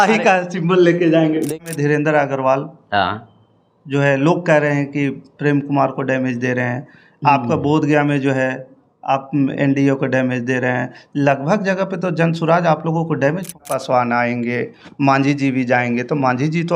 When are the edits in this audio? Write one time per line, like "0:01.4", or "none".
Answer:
0:01.5
0:13.7